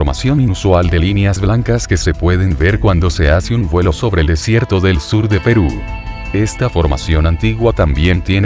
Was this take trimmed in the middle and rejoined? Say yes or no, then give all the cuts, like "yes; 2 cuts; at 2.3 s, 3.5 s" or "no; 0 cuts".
no; 0 cuts